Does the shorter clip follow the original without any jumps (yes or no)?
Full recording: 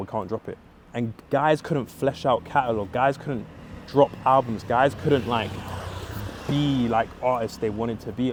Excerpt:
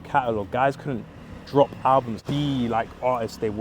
no